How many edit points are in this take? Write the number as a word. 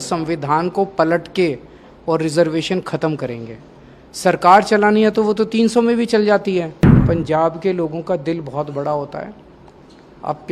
one